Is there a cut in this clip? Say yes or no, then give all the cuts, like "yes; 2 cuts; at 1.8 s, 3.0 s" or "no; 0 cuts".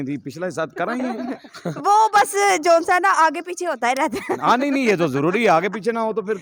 no; 0 cuts